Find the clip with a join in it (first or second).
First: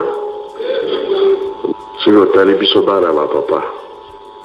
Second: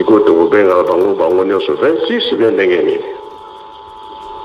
first